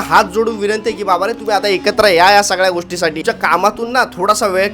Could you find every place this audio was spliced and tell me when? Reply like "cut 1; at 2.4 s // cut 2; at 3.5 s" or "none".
cut 1; at 3.2 s